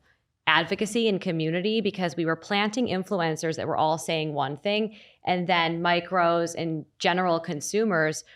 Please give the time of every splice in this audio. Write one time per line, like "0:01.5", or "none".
none